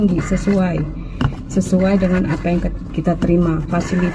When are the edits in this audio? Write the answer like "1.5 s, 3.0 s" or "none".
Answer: none